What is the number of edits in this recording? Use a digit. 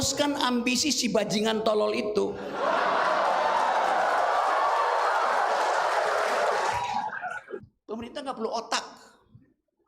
0